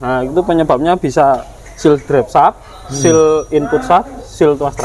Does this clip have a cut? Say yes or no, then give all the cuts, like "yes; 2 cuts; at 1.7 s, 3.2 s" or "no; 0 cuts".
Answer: no; 0 cuts